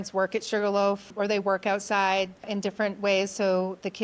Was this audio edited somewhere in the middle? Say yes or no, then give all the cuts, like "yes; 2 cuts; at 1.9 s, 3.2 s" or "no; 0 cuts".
yes; 2 cuts; at 1.1 s, 2.5 s